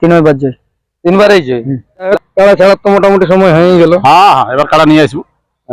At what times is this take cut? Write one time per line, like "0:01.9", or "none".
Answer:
0:02.1